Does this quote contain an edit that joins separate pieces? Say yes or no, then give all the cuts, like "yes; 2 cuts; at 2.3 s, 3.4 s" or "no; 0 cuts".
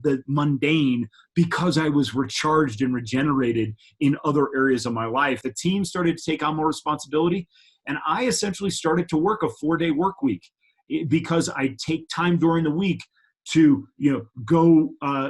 yes; 1 cut; at 5.5 s